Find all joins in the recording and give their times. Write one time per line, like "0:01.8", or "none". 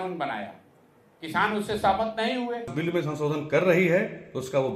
0:02.7